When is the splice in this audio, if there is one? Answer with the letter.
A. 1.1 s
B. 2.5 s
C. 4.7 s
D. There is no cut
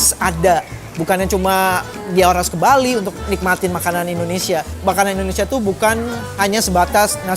C